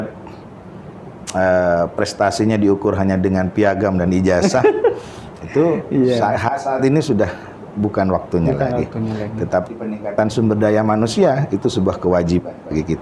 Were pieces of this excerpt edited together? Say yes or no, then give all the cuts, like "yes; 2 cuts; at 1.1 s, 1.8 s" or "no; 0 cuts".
no; 0 cuts